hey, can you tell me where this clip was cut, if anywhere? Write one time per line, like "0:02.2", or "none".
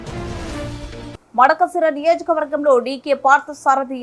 0:01.1